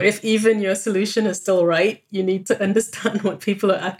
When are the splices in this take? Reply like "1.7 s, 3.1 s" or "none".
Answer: 2.4 s